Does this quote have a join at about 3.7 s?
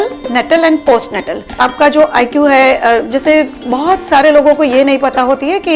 no; 1 cut; at 1.6 s

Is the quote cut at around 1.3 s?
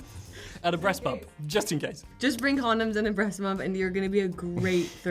no; 0 cuts

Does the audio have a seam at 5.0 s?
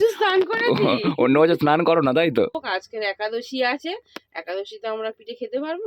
no; 1 cut; at 2.6 s

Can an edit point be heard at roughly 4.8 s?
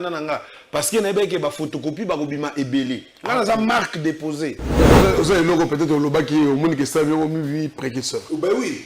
yes; 1 cut; at 4.8 s

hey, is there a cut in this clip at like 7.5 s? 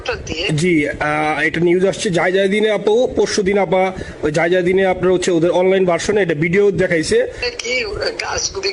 yes; 1 cut; at 7.5 s

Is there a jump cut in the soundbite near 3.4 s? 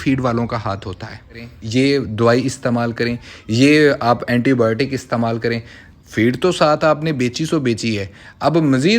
no; 1 cut; at 1.5 s

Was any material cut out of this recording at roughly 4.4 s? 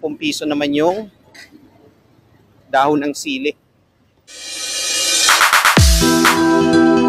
yes; 1 cut; at 4.4 s

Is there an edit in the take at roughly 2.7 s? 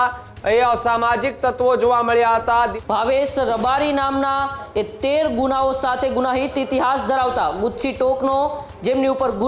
yes; 1 cut; at 2.7 s

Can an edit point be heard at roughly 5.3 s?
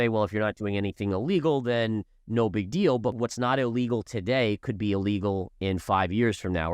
no; 1 cut; at 3.1 s

